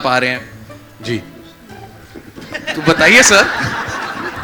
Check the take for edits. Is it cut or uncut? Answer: uncut